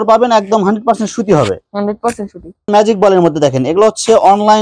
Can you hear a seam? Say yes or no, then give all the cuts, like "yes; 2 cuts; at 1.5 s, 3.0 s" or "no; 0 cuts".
yes; 1 cut; at 2.7 s